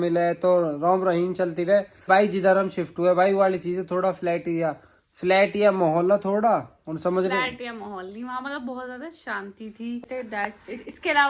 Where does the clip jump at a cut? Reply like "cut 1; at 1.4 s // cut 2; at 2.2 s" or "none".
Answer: cut 1; at 2.1 s // cut 2; at 10.0 s